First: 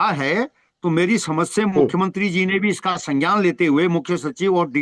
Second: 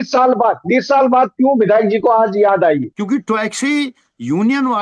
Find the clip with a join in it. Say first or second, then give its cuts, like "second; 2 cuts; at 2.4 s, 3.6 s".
second; 1 cut; at 2.9 s